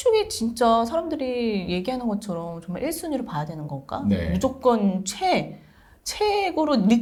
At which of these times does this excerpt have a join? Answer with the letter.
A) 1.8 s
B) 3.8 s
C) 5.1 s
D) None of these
D